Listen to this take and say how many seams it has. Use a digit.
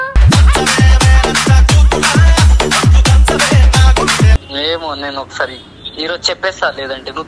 1